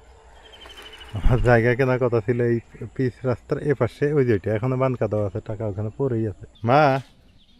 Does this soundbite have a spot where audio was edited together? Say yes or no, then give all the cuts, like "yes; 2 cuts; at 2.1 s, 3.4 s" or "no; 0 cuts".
yes; 1 cut; at 6.5 s